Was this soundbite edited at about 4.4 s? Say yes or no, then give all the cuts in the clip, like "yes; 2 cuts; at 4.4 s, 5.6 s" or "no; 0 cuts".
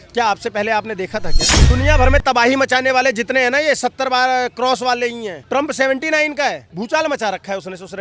no; 1 cut; at 1.4 s